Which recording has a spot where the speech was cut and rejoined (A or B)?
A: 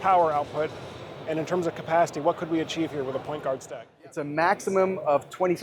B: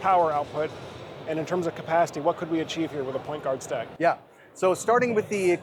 A